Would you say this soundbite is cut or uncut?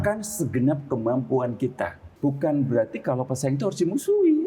cut